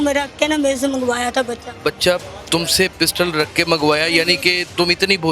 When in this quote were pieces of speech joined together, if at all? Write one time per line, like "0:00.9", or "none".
none